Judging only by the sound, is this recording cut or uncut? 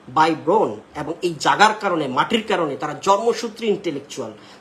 uncut